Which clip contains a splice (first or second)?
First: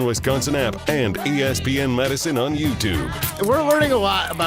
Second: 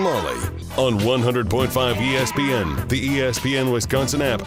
first